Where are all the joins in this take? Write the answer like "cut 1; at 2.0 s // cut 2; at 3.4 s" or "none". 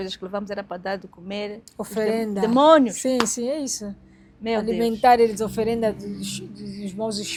none